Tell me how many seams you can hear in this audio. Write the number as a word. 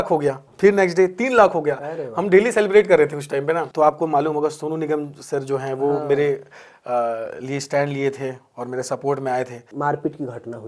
two